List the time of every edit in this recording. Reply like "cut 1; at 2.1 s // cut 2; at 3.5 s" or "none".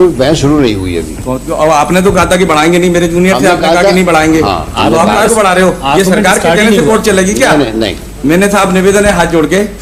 none